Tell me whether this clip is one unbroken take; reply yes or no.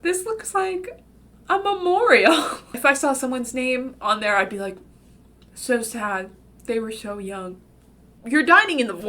no